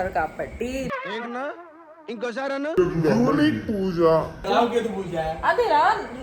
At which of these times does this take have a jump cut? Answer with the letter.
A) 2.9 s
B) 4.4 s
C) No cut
B